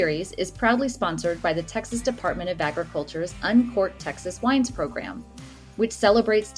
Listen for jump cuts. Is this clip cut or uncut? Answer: uncut